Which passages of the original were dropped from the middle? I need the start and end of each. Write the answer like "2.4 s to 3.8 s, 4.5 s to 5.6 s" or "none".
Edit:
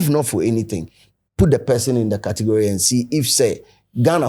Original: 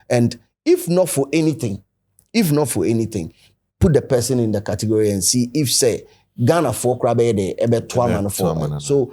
none